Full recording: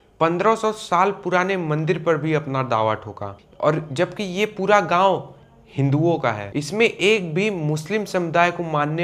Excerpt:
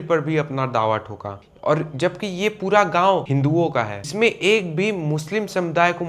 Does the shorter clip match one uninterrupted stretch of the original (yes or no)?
no